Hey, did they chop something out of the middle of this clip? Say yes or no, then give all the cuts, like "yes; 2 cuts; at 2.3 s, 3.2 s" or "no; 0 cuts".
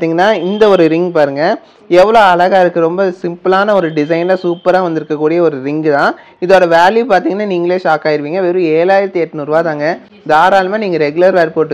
no; 0 cuts